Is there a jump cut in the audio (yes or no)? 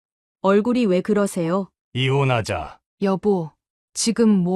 yes